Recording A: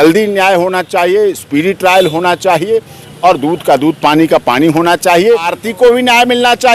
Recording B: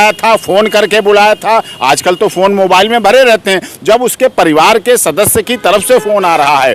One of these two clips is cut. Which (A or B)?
A